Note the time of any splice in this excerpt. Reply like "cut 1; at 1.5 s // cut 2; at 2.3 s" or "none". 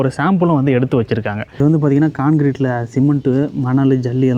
cut 1; at 1.5 s